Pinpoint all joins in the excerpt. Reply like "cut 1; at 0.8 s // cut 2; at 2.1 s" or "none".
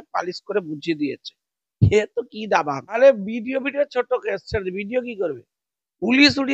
cut 1; at 3.0 s